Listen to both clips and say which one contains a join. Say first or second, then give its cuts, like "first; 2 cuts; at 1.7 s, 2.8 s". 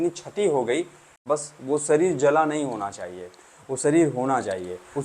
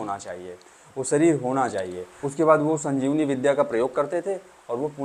first; 1 cut; at 1.2 s